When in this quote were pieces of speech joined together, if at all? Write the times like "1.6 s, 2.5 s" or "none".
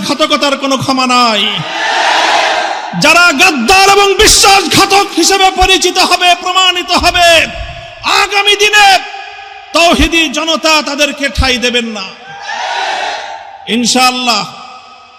none